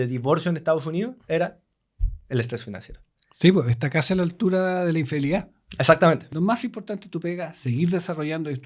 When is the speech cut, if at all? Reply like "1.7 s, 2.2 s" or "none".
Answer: 6.3 s